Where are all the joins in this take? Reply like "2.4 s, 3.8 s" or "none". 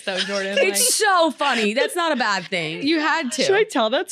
2.6 s